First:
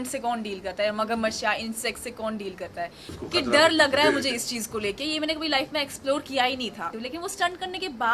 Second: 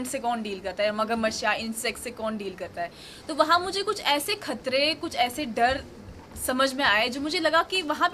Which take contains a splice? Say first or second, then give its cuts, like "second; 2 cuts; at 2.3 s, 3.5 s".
first; 2 cuts; at 3.1 s, 7.0 s